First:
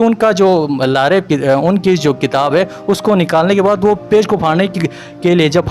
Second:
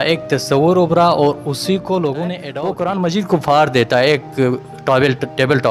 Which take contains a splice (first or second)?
second